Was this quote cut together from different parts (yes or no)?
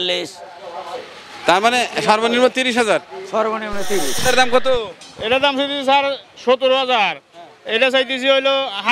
yes